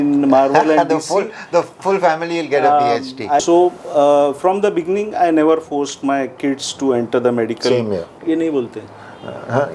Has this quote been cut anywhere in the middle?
yes; 2 cuts; at 3.4 s, 8.1 s

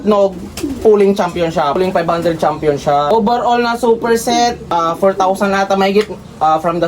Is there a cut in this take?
yes; 3 cuts; at 1.8 s, 3.1 s, 4.6 s

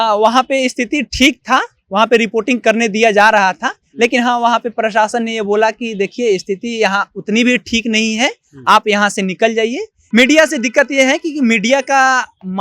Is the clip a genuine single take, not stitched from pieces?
no; 1 cut; at 9.9 s

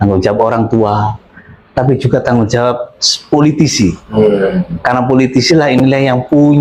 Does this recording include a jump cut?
no; 0 cuts

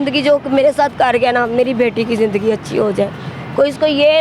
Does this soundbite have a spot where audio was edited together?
no; 0 cuts

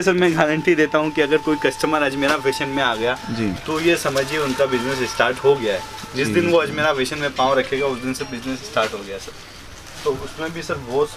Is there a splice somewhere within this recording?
no; 0 cuts

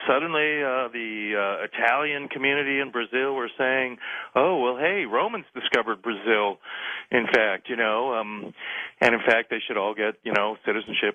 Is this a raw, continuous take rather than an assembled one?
yes; 0 cuts

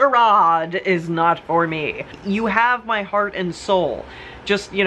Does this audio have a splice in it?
yes; 1 cut; at 2.1 s

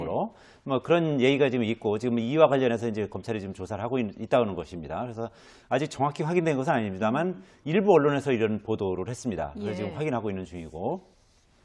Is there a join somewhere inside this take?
yes; 1 cut; at 8.2 s

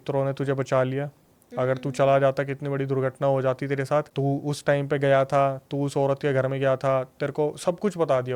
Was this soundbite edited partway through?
yes; 1 cut; at 4.1 s

